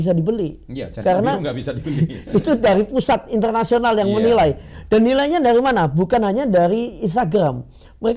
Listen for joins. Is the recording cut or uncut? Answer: uncut